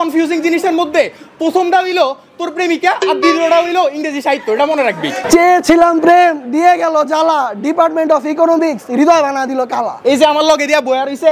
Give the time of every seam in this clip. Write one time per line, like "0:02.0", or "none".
0:05.2
0:09.9